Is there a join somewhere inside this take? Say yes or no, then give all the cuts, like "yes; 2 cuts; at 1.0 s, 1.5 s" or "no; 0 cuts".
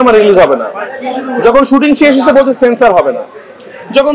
no; 0 cuts